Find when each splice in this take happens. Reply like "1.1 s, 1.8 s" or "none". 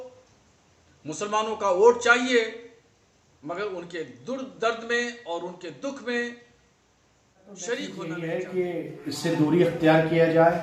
8.0 s